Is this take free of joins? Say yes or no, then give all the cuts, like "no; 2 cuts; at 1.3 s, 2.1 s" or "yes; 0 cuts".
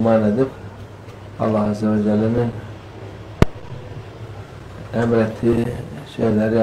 no; 1 cut; at 1.0 s